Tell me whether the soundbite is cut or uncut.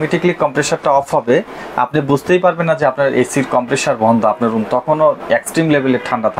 uncut